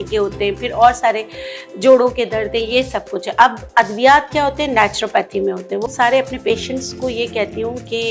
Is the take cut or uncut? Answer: cut